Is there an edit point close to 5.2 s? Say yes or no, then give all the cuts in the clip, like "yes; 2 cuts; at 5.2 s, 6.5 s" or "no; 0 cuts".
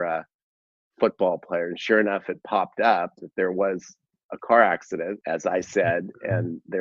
yes; 1 cut; at 5.2 s